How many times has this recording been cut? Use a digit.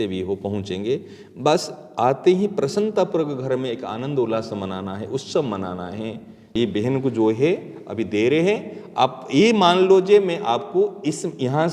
1